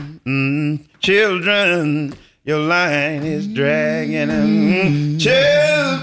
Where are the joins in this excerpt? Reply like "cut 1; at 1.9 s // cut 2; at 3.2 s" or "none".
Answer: none